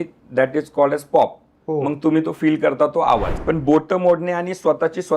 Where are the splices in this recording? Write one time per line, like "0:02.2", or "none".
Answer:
0:03.3